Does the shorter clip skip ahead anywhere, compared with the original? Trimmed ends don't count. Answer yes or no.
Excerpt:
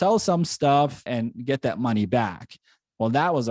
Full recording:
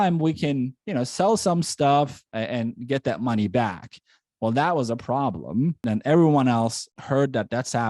yes